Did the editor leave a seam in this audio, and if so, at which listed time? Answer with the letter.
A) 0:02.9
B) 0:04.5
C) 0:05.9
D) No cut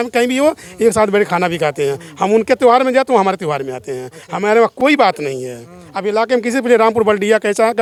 D